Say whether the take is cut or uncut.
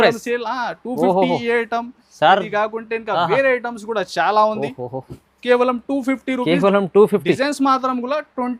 uncut